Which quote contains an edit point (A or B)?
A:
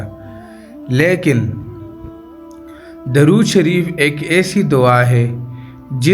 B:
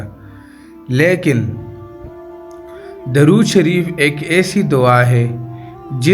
B